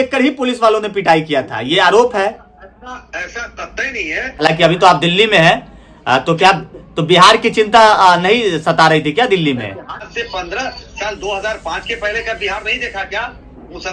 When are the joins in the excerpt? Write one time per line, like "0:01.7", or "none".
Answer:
0:04.4
0:10.1